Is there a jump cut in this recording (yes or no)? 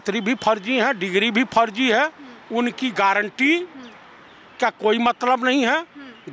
no